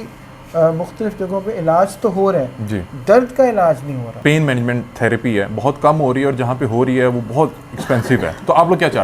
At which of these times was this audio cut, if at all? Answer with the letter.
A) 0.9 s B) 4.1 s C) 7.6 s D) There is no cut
B